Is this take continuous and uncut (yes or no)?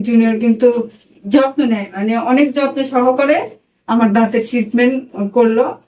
yes